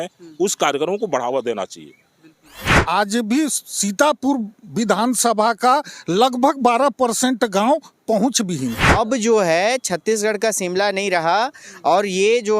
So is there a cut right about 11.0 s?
no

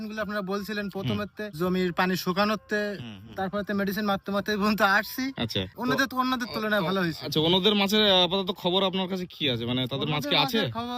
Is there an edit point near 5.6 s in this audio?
yes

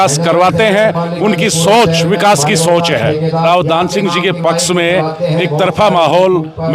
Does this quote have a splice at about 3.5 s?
yes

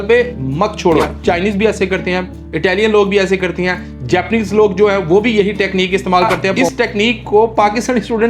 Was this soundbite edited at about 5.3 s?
no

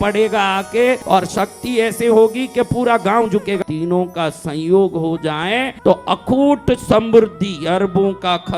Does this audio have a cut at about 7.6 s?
no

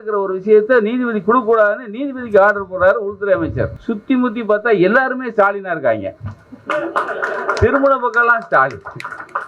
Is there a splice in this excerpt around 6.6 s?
no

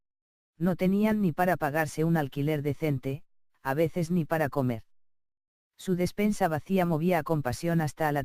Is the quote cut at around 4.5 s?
yes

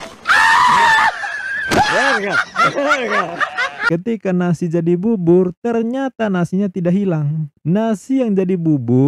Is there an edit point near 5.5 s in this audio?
no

